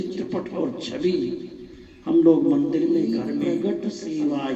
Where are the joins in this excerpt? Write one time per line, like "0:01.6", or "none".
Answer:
0:03.4